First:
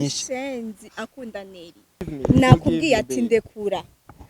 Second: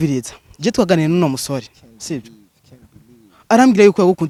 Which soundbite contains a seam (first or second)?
first